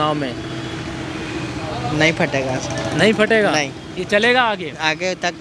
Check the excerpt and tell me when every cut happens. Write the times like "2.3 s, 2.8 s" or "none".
none